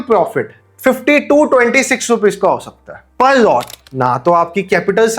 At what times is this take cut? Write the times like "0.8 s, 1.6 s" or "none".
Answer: 3.7 s